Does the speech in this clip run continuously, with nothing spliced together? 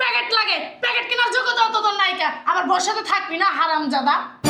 yes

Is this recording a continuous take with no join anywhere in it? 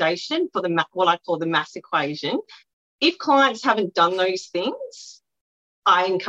no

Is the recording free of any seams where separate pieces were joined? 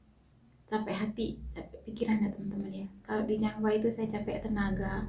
yes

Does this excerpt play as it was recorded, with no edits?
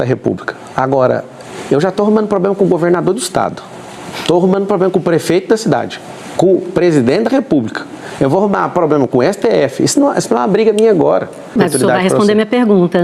no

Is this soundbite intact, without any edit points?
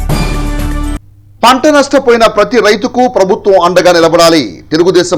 no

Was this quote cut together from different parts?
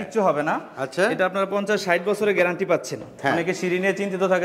yes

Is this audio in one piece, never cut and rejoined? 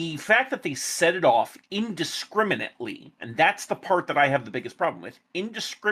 yes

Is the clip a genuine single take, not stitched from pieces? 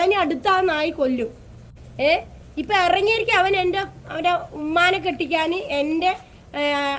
no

